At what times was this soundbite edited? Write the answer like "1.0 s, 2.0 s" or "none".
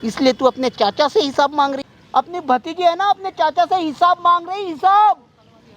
1.8 s